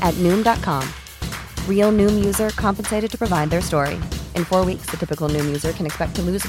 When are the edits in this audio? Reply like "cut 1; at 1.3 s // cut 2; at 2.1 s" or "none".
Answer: none

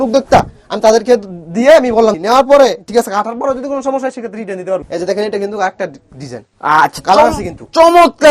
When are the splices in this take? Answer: cut 1; at 2.2 s // cut 2; at 4.8 s

